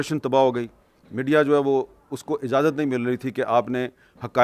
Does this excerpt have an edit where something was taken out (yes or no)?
no